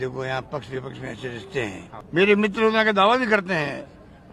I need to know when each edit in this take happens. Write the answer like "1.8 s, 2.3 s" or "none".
1.9 s